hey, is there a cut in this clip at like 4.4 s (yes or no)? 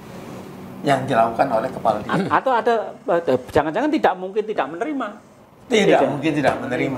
no